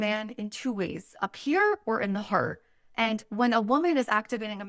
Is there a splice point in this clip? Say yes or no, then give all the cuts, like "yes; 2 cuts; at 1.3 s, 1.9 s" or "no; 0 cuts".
no; 0 cuts